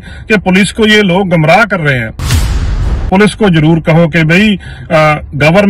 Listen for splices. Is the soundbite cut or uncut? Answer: cut